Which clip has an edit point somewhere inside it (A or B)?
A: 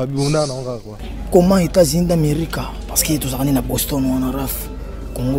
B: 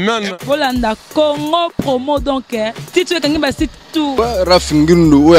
B